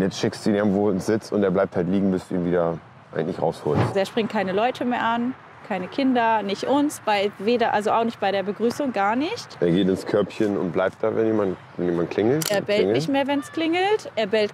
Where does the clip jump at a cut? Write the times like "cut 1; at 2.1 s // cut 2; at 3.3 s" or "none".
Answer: cut 1; at 3.9 s // cut 2; at 12.5 s